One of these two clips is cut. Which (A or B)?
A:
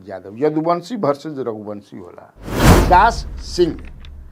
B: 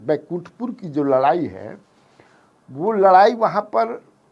A